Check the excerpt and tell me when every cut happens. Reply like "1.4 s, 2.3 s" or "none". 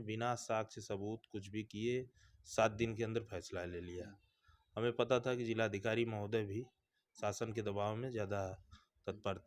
none